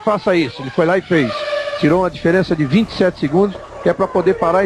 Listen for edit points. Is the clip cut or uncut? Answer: uncut